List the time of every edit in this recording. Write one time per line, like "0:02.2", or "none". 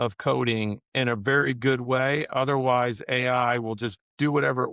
none